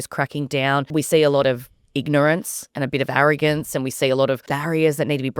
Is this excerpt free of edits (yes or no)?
no